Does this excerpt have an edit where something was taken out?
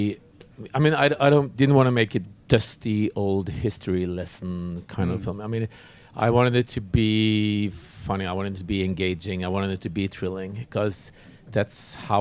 no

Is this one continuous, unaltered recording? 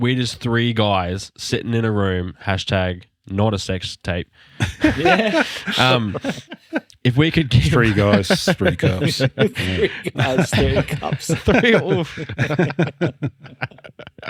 yes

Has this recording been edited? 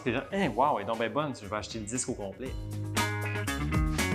yes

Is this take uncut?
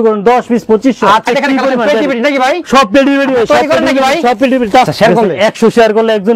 no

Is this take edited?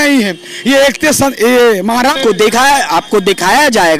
yes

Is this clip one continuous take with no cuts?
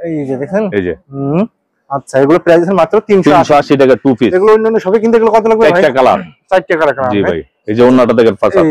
yes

